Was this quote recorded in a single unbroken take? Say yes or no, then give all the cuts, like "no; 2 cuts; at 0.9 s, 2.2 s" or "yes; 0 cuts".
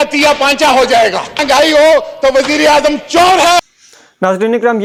yes; 0 cuts